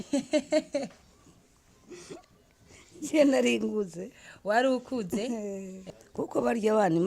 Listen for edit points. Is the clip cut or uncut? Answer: cut